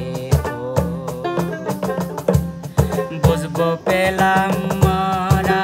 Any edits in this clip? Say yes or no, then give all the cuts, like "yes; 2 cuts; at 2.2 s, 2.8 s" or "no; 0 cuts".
no; 0 cuts